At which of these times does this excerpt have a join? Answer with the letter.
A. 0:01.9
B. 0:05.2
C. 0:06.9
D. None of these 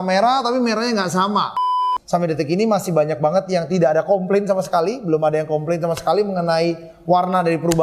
A